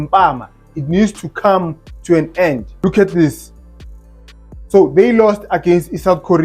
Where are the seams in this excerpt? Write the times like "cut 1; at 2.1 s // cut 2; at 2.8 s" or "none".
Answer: cut 1; at 2.7 s